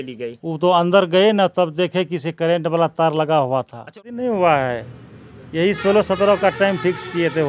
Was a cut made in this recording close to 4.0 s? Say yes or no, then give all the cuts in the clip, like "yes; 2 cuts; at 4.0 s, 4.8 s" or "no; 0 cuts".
yes; 1 cut; at 4.0 s